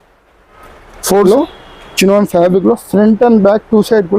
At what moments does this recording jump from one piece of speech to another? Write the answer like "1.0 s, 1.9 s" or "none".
1.2 s